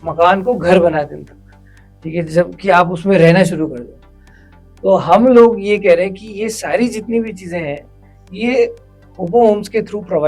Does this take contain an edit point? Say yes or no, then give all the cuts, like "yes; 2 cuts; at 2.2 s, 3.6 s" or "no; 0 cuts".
no; 0 cuts